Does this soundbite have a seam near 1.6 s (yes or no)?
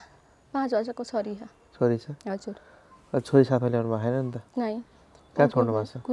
no